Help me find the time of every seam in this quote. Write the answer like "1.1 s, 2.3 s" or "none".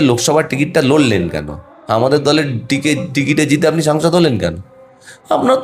none